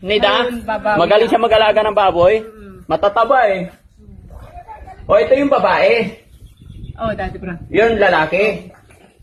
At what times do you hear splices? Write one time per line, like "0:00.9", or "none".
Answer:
none